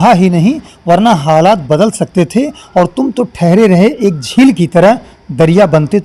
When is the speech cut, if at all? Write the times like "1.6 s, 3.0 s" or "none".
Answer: none

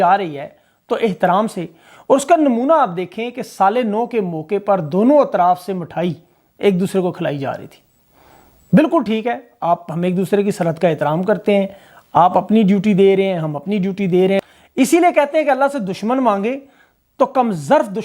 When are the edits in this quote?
14.4 s

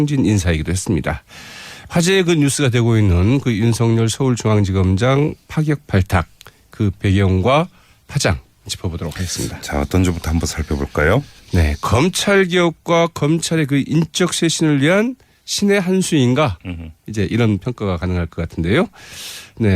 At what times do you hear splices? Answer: 3.4 s

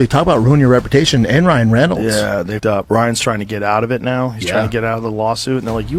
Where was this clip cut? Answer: none

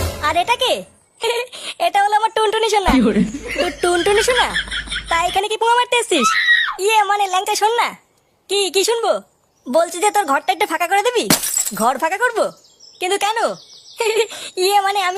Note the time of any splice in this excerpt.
1.2 s

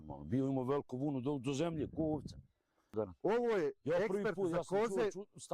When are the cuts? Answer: 2.9 s

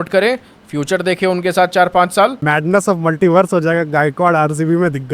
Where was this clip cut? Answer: 2.4 s

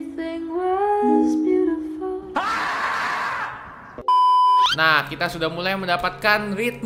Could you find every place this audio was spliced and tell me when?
2.3 s, 4.6 s

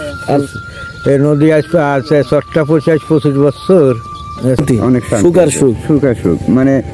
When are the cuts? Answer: 4.6 s

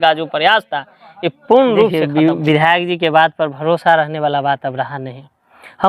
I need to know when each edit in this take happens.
1.9 s

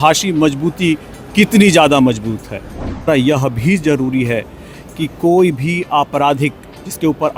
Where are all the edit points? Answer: 3.1 s

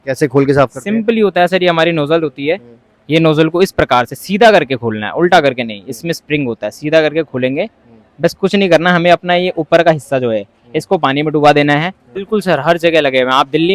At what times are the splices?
12.1 s

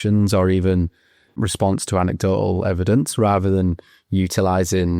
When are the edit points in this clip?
1.4 s

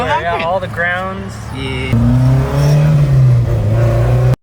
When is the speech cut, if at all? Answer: 1.9 s

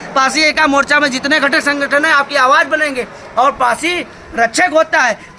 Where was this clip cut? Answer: none

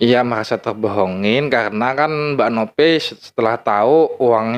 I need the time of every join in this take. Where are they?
none

